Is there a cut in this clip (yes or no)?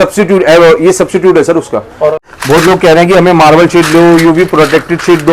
yes